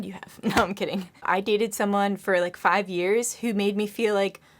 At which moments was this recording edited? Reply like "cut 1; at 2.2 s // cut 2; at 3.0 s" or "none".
cut 1; at 1.1 s